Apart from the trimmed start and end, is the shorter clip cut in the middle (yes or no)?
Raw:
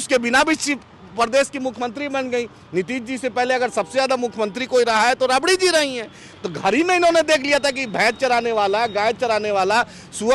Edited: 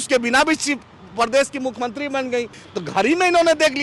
yes